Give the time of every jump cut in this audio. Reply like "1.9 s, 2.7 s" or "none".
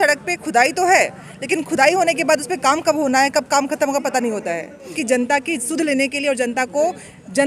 5.0 s